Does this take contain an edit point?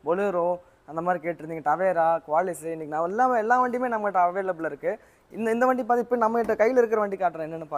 no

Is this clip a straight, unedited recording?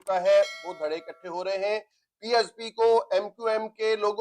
yes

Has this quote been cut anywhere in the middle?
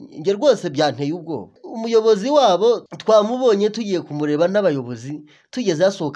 yes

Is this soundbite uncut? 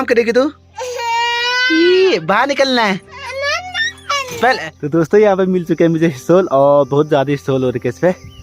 no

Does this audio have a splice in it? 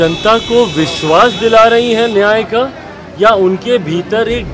no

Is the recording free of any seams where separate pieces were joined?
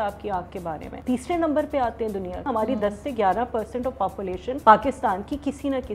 no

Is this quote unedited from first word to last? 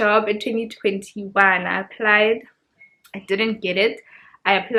yes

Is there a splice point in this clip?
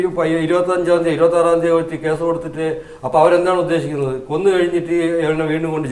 no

